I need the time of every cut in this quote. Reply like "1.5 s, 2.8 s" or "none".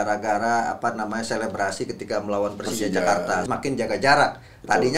3.4 s